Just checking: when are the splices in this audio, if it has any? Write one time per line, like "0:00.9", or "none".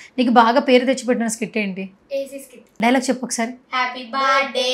0:02.6